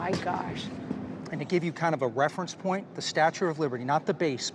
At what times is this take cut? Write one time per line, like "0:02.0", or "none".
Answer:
0:01.2